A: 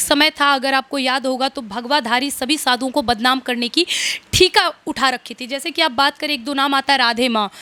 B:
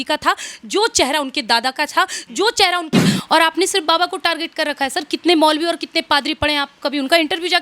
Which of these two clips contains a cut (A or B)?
B